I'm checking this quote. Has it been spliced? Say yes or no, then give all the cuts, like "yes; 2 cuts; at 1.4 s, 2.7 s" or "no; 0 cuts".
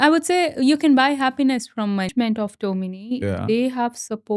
yes; 1 cut; at 2.1 s